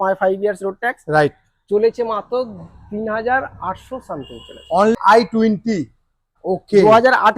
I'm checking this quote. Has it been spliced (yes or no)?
yes